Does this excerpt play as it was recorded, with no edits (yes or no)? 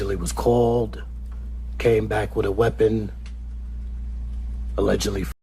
yes